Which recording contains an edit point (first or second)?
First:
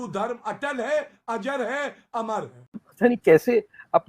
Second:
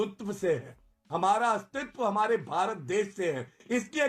first